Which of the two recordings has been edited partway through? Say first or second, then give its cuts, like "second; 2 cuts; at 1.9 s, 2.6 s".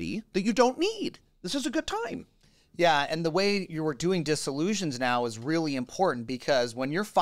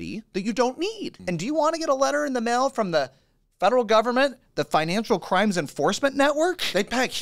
second; 1 cut; at 1.1 s